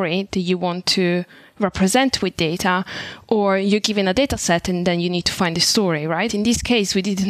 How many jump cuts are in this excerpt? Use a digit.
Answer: 1